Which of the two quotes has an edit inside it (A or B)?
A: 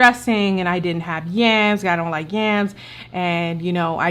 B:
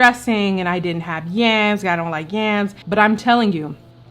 B